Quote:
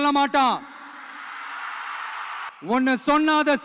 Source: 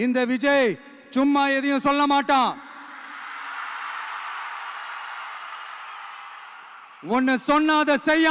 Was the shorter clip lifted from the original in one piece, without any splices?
no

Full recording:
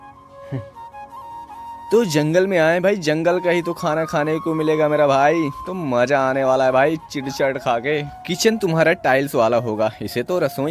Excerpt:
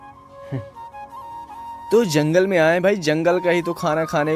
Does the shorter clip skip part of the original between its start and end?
no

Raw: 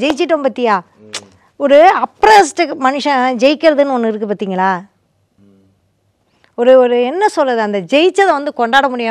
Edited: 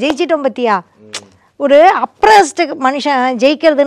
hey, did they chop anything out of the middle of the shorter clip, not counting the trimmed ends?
no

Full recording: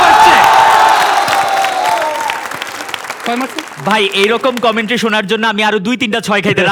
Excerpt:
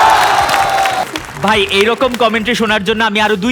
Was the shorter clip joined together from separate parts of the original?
yes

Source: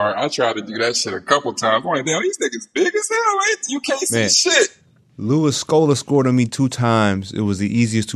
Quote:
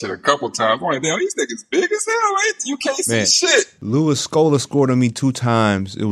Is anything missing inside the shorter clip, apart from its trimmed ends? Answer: yes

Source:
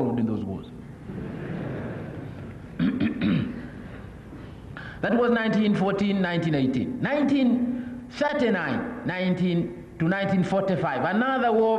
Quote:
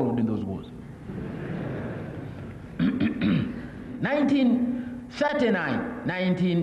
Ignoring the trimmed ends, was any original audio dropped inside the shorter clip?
yes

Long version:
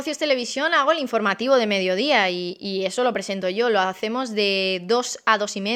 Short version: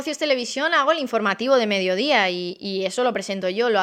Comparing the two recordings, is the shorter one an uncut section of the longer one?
yes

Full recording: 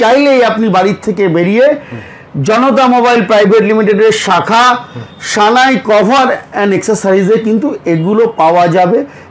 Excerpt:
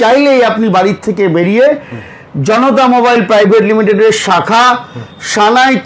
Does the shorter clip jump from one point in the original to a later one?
no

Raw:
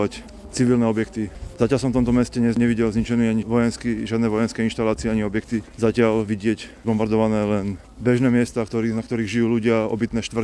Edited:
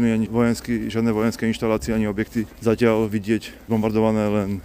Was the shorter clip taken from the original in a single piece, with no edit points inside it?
yes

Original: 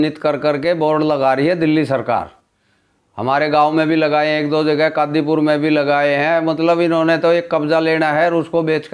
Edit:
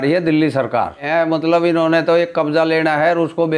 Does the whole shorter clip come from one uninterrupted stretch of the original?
no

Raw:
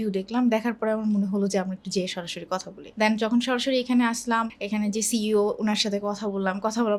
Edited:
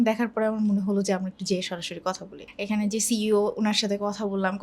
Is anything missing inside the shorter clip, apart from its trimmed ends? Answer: yes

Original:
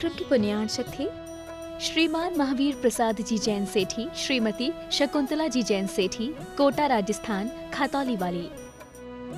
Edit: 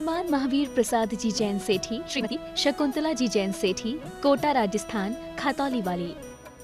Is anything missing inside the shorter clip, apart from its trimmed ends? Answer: yes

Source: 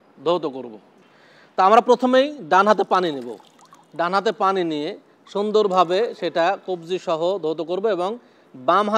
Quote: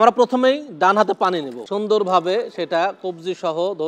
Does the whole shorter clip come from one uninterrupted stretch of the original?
no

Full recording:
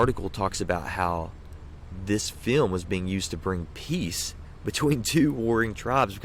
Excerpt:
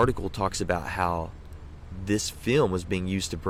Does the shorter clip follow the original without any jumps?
yes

